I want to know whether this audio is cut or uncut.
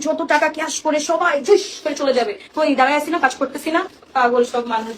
uncut